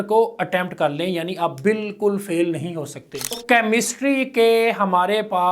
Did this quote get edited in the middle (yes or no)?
yes